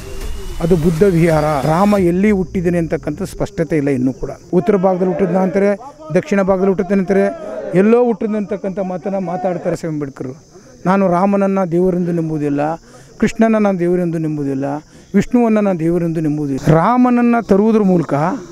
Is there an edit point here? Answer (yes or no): yes